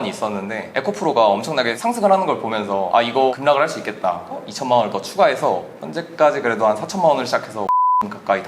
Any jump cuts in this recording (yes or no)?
yes